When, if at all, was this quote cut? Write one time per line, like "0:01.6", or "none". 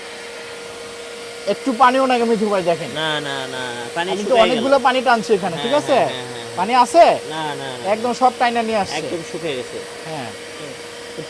none